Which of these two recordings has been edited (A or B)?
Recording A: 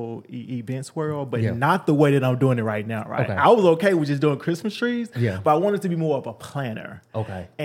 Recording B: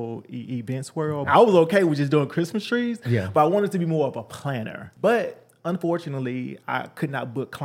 B